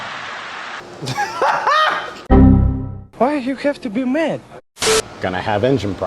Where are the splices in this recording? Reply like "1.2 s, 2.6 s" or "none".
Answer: 5.1 s